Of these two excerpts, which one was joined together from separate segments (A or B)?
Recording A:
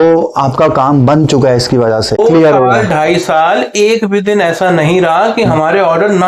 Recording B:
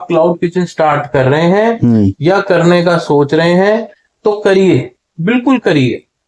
A